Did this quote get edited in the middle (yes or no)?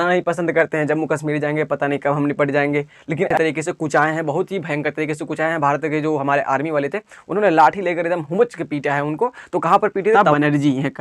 yes